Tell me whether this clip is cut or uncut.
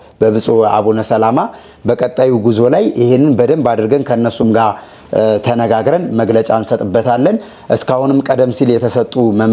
uncut